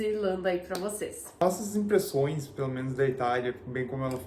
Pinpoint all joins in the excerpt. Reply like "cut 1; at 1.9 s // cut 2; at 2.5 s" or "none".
none